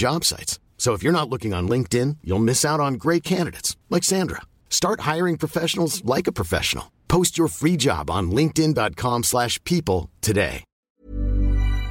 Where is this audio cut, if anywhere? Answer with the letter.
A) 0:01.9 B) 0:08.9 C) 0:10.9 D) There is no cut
C